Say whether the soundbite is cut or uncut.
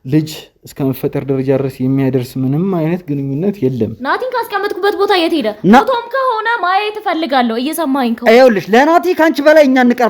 cut